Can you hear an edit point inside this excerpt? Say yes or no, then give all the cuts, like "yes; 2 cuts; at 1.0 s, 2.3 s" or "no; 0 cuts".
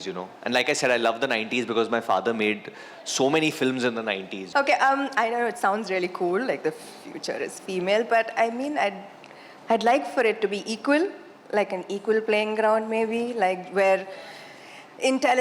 yes; 1 cut; at 4.3 s